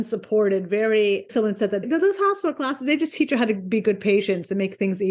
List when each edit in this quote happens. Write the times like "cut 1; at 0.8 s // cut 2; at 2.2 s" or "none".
cut 1; at 1.3 s